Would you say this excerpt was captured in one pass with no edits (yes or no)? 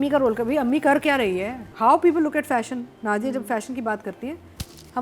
no